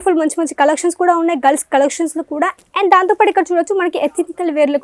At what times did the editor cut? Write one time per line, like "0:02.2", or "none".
0:02.6

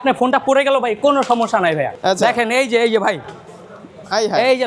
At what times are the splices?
0:01.9

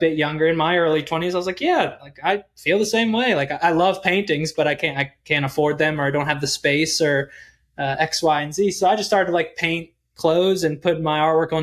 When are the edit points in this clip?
none

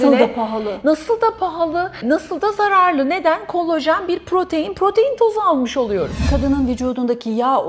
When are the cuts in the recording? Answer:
0:02.0
0:06.3

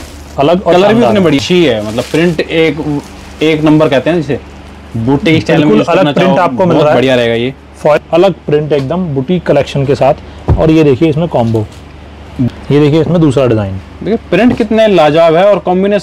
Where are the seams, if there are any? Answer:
0:01.4
0:08.0
0:12.5

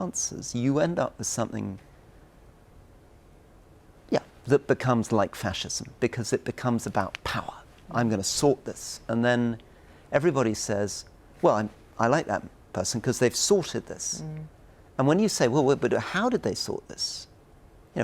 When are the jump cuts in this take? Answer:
none

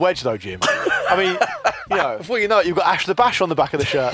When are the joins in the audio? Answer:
0:02.2

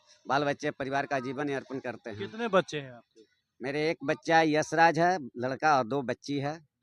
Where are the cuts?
none

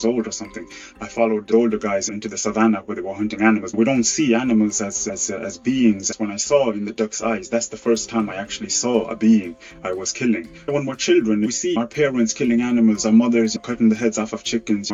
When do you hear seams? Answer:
none

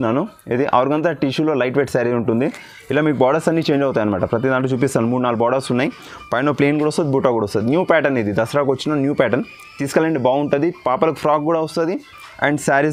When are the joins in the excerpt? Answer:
none

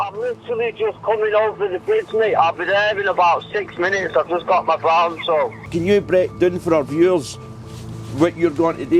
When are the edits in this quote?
0:05.6

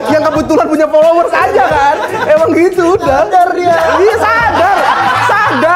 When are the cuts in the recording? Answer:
none

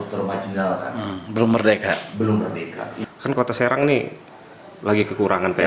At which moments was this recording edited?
0:02.9

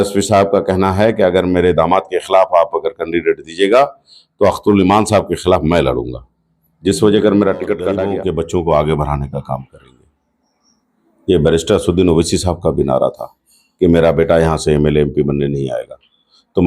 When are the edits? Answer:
0:08.0

